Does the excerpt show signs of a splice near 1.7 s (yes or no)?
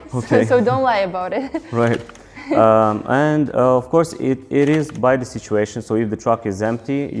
no